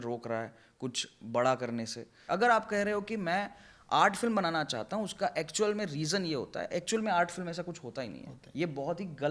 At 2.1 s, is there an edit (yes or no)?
yes